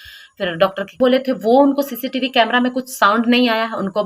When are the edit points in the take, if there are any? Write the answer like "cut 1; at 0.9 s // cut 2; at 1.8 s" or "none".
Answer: cut 1; at 1.0 s